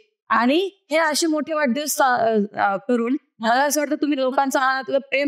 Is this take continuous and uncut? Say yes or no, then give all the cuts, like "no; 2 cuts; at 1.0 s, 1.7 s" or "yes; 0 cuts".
yes; 0 cuts